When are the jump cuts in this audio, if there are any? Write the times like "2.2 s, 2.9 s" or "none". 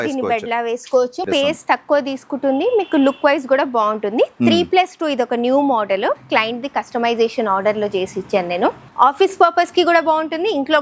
1.2 s, 8.8 s